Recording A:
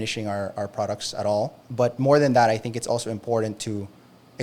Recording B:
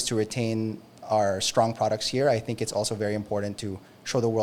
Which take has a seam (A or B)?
A